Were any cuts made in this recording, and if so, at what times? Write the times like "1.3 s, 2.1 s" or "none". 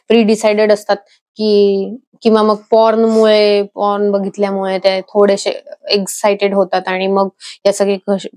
none

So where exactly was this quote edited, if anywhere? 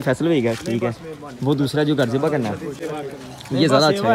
none

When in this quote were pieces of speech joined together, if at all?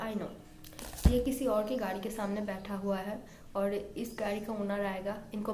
none

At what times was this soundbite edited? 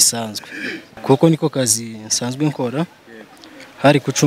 0.9 s

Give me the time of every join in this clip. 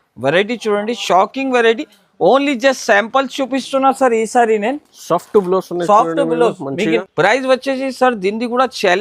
7.0 s

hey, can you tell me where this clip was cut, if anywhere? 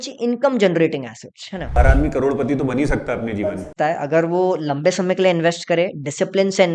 1.8 s

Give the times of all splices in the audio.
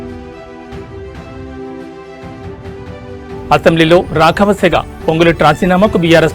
3.3 s

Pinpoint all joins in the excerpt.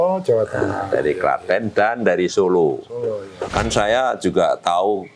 3.3 s

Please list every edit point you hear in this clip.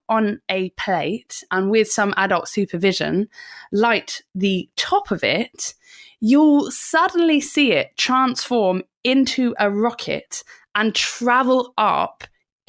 none

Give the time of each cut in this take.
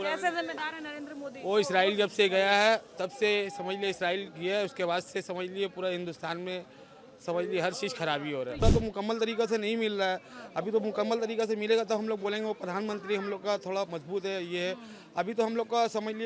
8.6 s

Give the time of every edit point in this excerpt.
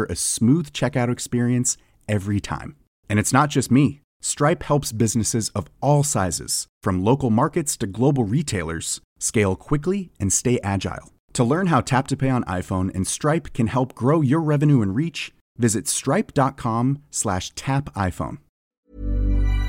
18.7 s

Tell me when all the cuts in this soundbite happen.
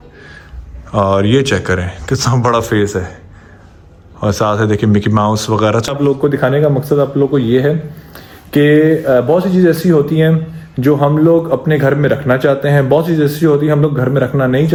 none

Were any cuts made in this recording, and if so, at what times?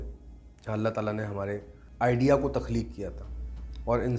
1.8 s

